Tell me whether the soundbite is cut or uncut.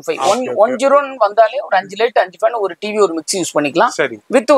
uncut